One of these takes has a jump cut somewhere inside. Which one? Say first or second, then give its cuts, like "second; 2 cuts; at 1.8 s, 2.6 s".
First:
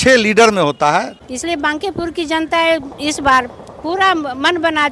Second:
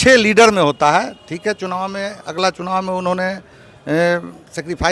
first; 1 cut; at 1.2 s